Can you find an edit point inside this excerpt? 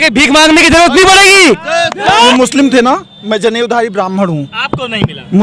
yes; 1 cut; at 2.2 s

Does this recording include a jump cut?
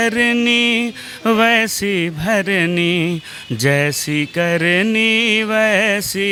no; 0 cuts

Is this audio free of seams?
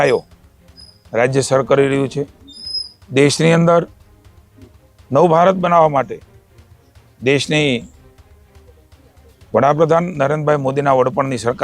yes; 0 cuts

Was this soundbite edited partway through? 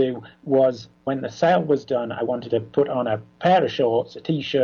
yes; 1 cut; at 0.9 s

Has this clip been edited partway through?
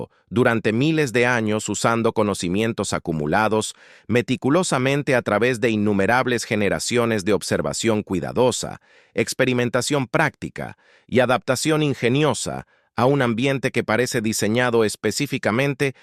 no; 0 cuts

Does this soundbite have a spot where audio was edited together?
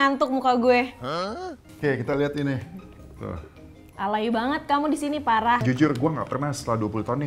yes; 2 cuts; at 1.6 s, 5.6 s

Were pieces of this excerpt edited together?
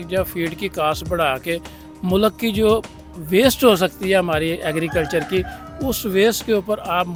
no; 0 cuts

